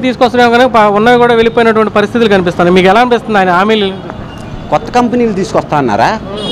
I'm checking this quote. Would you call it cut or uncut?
uncut